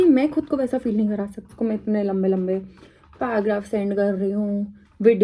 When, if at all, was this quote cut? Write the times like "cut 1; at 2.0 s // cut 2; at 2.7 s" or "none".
cut 1; at 1.5 s

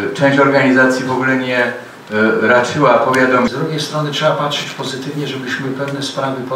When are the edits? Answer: cut 1; at 3.5 s

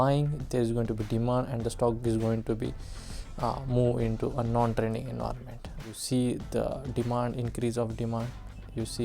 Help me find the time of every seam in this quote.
cut 1; at 6.0 s

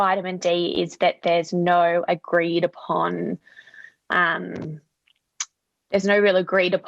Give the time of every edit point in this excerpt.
none

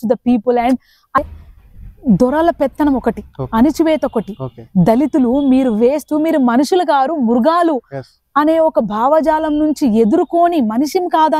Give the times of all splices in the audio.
cut 1; at 1.2 s

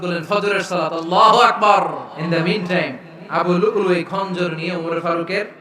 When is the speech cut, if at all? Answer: cut 1; at 2.1 s

